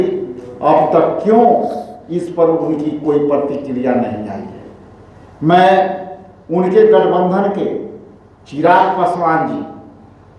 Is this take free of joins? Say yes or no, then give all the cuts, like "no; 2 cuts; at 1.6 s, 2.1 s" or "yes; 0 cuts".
yes; 0 cuts